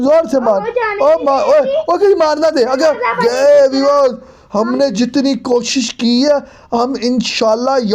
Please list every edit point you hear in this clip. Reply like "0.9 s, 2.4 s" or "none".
3.2 s